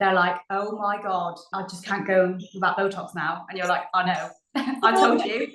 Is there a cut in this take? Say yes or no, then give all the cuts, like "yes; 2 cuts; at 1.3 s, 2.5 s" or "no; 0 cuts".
yes; 1 cut; at 1.4 s